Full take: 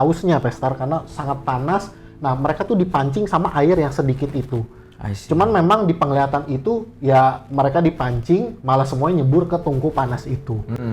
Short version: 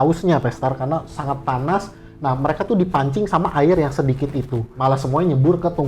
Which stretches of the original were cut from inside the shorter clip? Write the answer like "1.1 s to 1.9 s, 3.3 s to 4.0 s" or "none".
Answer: 4.7 s to 8.6 s